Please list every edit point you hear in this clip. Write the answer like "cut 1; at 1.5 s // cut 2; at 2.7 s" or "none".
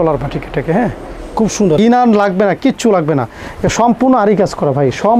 cut 1; at 1.8 s